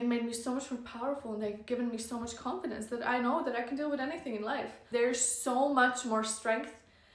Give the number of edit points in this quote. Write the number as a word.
one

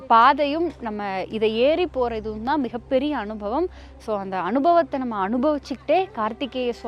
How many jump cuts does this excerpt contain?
zero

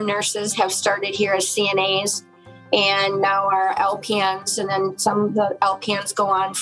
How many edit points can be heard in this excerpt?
zero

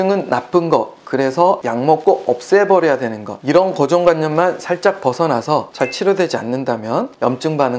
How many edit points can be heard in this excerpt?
zero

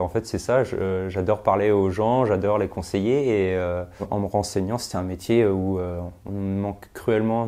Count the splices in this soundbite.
one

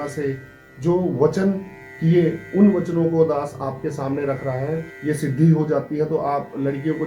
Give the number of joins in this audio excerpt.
one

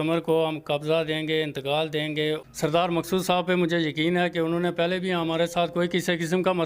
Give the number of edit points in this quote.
one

